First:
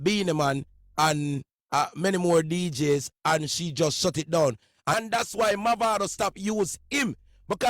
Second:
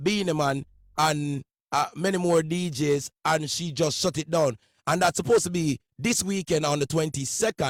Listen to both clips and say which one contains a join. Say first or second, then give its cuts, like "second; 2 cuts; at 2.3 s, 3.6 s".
first; 1 cut; at 4.9 s